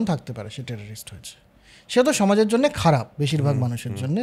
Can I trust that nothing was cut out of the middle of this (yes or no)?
yes